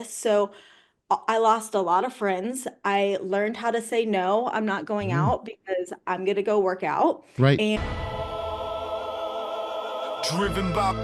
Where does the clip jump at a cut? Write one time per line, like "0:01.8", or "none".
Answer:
0:08.0